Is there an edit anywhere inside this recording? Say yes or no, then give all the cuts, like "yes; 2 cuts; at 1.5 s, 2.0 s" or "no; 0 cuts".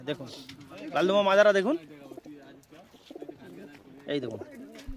no; 0 cuts